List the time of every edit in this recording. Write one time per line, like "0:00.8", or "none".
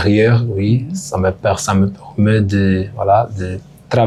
none